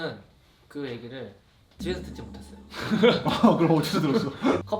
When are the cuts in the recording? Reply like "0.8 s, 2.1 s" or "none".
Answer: none